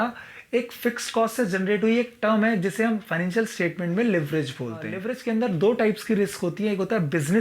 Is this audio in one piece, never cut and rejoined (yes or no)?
no